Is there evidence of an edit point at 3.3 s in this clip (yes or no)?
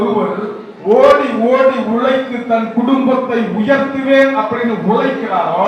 no